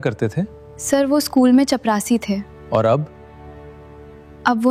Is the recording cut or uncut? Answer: uncut